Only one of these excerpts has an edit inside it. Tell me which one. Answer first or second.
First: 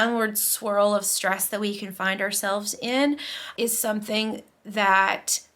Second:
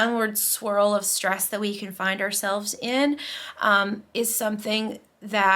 first